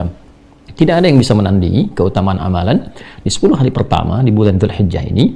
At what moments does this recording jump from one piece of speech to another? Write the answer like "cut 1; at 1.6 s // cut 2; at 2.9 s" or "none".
none